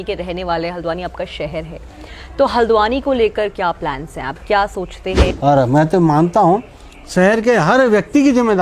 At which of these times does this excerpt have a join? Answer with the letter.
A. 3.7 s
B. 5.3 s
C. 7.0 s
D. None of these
B